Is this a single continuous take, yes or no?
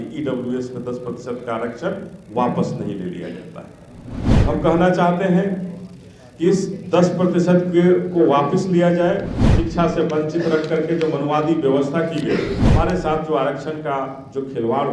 no